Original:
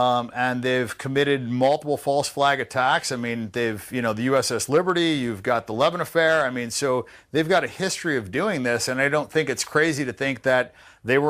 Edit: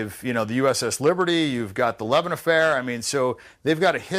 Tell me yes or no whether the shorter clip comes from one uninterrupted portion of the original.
yes